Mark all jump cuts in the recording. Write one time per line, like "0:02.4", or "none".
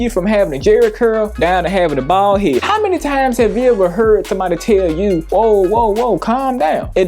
0:02.6